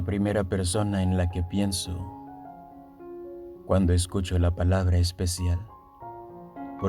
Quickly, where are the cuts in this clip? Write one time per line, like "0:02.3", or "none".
none